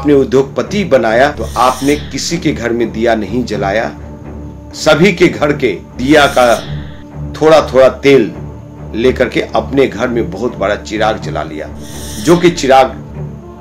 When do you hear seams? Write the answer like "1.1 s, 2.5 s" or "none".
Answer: 1.4 s, 5.9 s